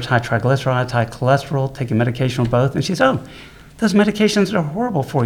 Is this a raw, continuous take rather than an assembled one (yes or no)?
yes